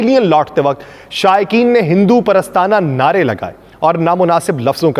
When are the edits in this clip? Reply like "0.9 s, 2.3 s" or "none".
none